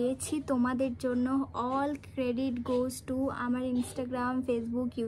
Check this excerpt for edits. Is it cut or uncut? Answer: uncut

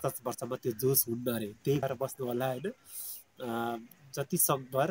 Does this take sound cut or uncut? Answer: cut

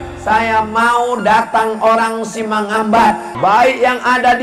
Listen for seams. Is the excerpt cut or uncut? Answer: cut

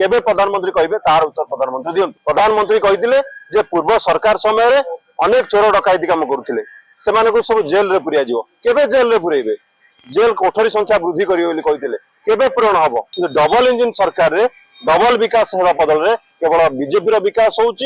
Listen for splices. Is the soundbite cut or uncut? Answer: cut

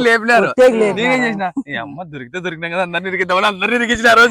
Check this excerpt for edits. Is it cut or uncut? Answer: uncut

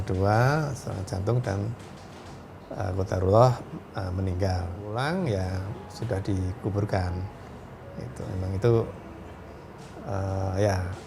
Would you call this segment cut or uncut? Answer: cut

